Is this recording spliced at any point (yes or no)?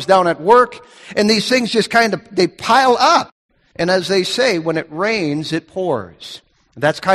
yes